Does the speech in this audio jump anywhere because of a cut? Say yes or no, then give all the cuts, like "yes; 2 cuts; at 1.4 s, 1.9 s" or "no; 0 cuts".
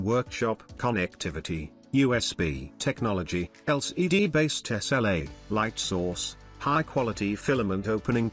no; 0 cuts